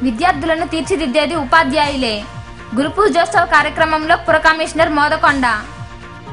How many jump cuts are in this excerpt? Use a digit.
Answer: 0